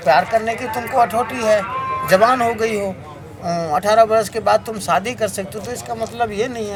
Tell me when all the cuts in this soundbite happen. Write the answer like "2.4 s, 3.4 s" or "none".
none

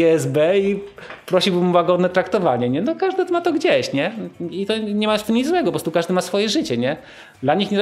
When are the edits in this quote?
none

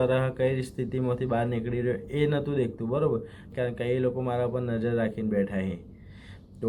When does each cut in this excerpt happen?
3.5 s

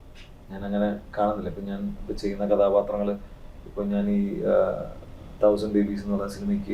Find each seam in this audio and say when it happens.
none

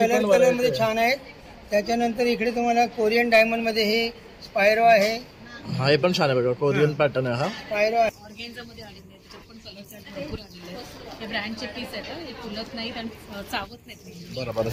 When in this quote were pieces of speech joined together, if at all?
8.1 s

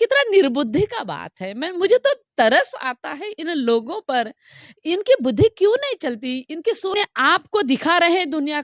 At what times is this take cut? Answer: 6.9 s

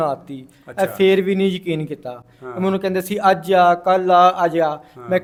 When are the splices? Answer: none

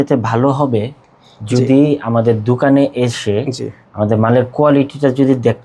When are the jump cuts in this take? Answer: none

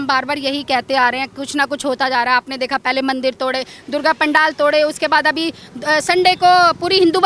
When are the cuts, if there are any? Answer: none

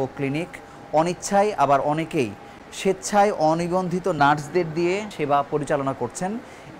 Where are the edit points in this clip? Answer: none

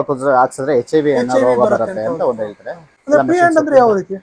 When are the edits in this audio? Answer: 2.9 s

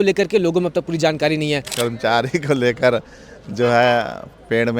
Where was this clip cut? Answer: 1.7 s

